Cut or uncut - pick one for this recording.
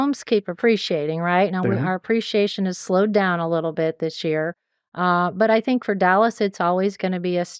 uncut